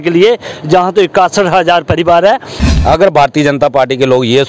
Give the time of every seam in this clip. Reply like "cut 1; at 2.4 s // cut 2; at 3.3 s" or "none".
cut 1; at 2.6 s